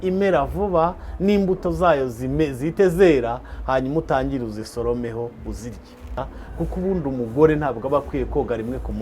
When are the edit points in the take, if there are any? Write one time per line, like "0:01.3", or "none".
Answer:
0:06.2